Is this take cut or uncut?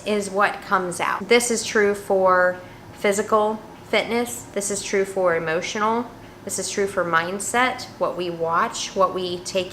cut